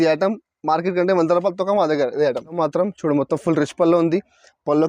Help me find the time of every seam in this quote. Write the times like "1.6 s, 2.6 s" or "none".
2.6 s